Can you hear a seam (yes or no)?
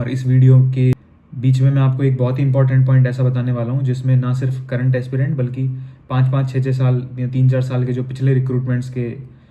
yes